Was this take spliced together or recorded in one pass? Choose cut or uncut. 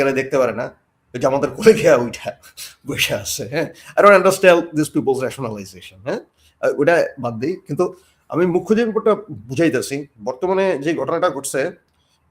uncut